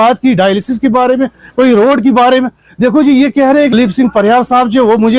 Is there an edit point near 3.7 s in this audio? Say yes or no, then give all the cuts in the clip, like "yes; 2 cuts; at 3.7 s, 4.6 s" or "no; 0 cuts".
yes; 1 cut; at 3.7 s